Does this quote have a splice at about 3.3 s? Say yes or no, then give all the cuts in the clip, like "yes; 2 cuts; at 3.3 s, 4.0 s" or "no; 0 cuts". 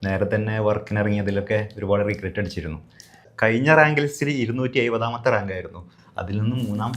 yes; 1 cut; at 3.3 s